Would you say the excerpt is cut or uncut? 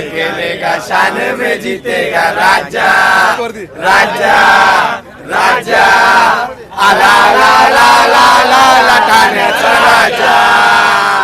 uncut